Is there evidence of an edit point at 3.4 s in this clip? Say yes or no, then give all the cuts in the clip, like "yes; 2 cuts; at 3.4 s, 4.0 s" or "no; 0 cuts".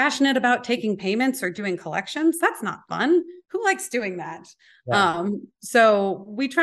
yes; 1 cut; at 3.4 s